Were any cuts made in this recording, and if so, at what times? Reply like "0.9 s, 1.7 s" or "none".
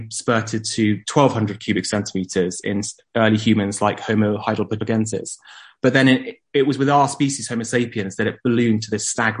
4.4 s